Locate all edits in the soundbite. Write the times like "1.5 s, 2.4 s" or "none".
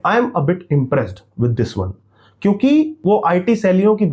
2.9 s